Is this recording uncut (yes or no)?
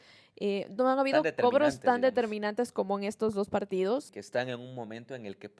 no